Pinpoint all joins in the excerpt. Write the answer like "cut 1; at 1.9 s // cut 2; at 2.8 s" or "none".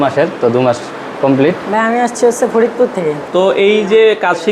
cut 1; at 1.6 s // cut 2; at 3.2 s